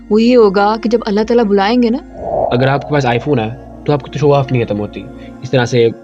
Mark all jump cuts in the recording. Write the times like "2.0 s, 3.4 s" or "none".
2.4 s